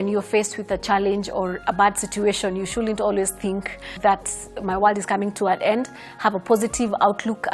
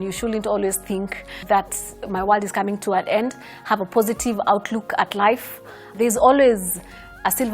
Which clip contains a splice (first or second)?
second